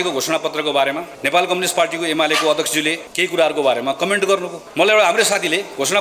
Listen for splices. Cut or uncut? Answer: cut